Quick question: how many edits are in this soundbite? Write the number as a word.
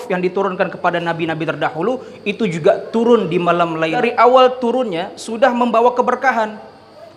one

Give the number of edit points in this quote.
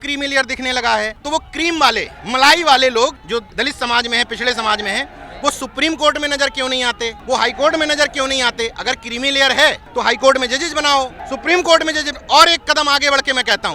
six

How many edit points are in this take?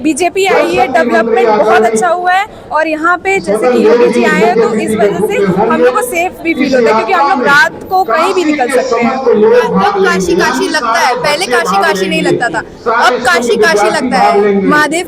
zero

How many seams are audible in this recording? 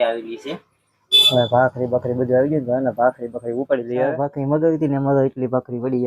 one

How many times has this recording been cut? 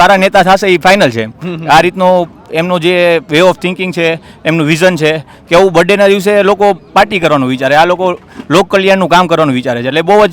zero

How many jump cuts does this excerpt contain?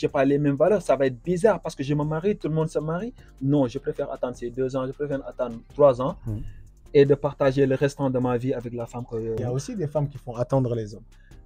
one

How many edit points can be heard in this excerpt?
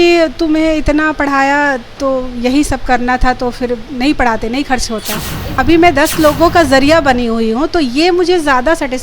one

